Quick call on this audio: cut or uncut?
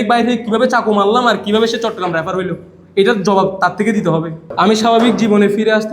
cut